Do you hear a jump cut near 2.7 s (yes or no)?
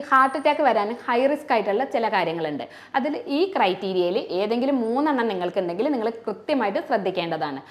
no